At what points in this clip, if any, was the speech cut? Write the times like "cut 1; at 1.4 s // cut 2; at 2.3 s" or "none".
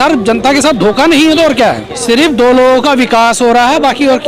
cut 1; at 1.9 s